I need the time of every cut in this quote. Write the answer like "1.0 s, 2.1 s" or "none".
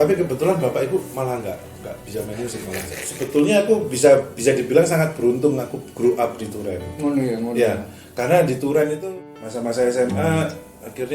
3.0 s, 9.0 s